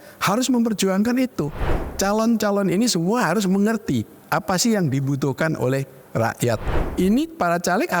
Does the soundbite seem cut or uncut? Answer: cut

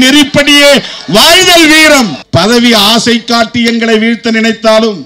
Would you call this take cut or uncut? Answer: cut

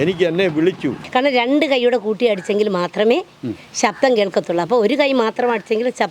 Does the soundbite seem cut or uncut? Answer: cut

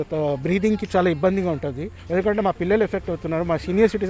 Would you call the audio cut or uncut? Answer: cut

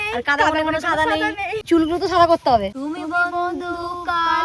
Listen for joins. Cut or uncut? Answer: cut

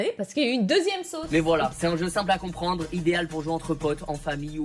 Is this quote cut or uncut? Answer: cut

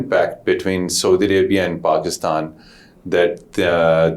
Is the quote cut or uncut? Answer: uncut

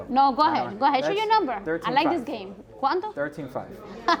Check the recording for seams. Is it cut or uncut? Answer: uncut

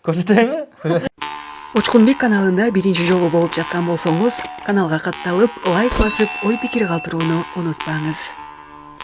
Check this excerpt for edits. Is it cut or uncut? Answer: cut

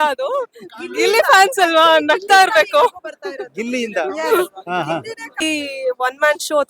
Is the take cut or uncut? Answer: cut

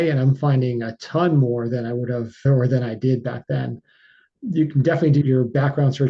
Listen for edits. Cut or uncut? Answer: cut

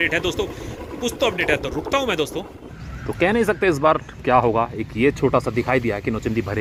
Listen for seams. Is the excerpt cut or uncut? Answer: uncut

